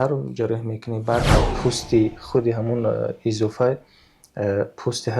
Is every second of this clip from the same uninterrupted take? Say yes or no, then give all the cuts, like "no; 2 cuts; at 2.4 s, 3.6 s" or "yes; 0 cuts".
no; 1 cut; at 1.5 s